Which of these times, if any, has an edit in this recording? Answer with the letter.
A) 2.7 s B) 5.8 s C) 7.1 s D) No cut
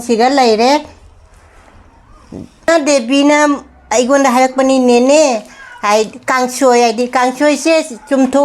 A